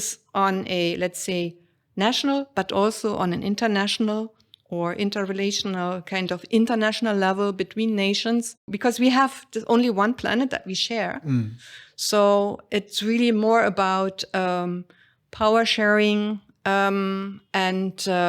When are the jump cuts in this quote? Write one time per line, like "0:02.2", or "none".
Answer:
0:08.7